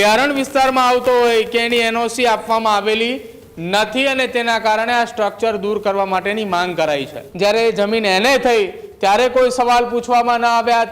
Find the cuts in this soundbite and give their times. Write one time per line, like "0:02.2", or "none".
0:07.2